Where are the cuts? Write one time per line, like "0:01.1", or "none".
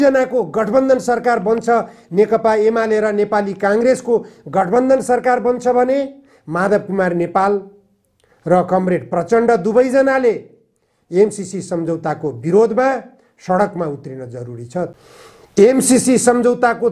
0:14.9